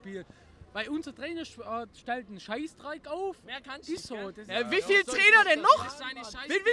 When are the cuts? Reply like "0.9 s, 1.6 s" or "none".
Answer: none